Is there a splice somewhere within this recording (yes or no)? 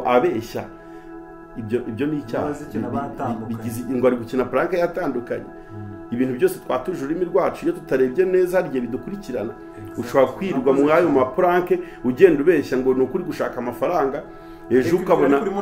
no